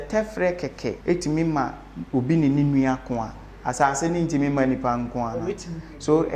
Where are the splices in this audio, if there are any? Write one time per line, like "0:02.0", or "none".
0:01.0

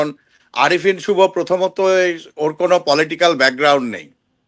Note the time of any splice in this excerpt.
none

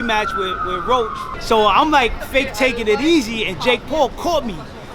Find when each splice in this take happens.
0:01.3

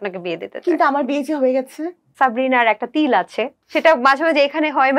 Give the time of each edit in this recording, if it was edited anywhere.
0:02.1
0:03.6

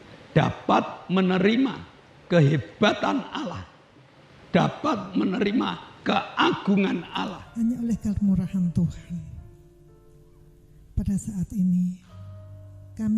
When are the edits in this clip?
0:07.4

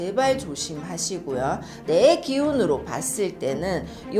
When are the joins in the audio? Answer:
0:01.8

